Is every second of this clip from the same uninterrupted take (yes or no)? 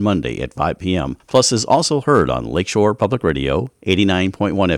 no